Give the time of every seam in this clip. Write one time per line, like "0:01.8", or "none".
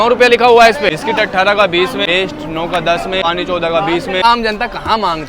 0:00.9
0:02.0
0:03.2
0:04.2